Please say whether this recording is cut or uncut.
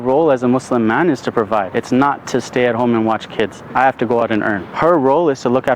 cut